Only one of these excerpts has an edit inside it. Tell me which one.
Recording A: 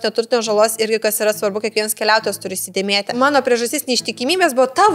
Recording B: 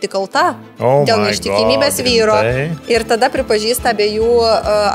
A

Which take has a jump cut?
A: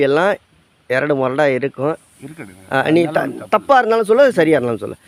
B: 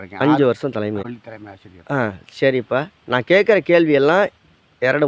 B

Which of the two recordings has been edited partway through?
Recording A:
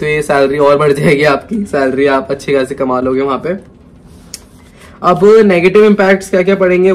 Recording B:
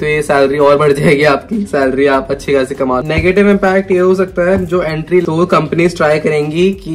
B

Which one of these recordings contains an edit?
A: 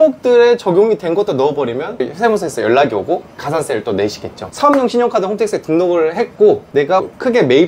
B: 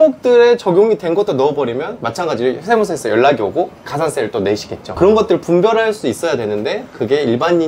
A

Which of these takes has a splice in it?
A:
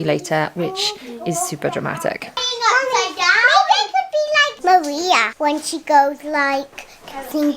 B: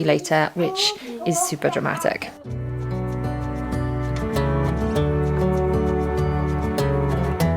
A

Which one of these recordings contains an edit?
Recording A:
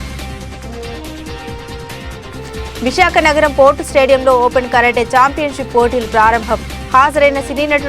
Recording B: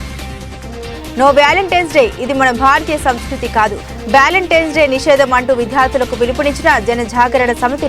B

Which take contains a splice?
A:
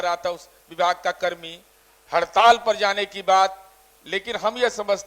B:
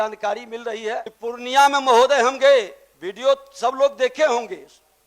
B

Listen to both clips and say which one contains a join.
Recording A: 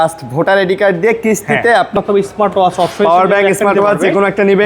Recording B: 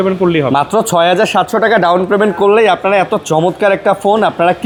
A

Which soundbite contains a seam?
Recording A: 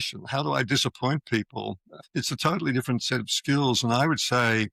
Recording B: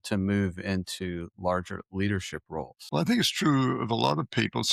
A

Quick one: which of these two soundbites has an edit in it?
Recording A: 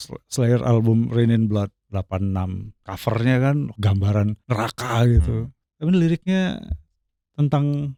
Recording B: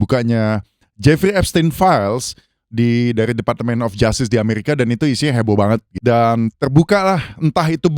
B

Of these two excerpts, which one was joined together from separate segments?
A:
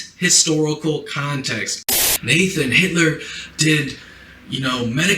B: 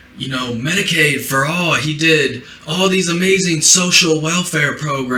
A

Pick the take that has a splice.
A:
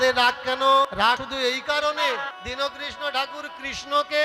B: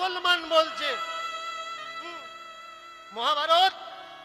A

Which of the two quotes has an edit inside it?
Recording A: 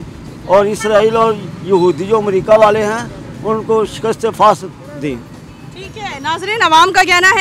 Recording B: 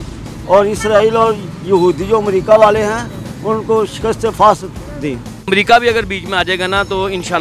B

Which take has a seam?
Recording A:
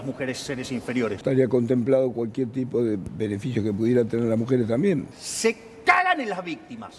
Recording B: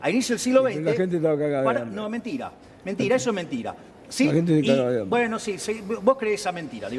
A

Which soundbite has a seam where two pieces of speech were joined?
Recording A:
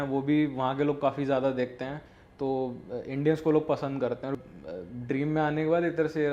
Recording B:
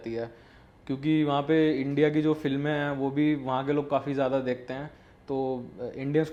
A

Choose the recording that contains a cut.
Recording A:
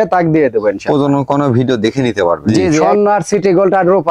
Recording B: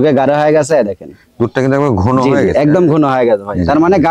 A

